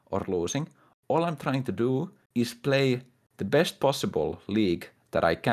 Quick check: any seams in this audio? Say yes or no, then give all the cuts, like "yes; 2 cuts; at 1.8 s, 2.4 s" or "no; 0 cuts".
no; 0 cuts